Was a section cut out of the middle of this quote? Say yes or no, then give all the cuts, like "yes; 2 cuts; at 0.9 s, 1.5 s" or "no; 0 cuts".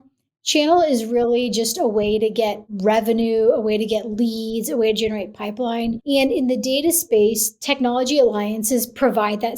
yes; 2 cuts; at 2.7 s, 6.0 s